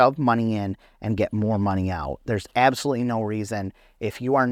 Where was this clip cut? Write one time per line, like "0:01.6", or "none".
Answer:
none

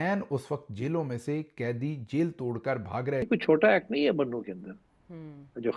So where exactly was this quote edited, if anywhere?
none

